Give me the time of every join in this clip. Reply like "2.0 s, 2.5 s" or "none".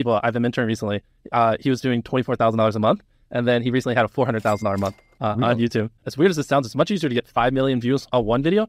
5.9 s